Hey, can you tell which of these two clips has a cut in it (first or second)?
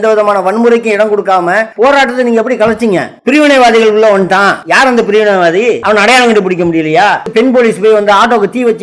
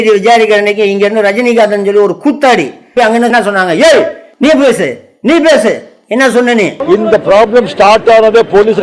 first